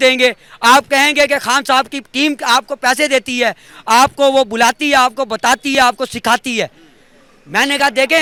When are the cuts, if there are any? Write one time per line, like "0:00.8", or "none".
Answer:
none